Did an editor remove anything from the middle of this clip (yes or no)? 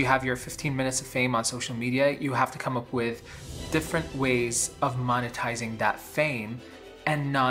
no